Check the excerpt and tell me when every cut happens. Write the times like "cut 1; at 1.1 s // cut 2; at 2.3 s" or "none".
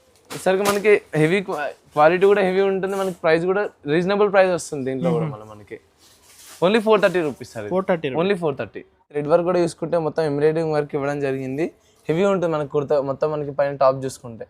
cut 1; at 9.1 s